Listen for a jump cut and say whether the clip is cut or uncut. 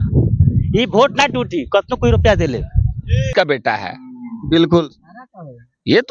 cut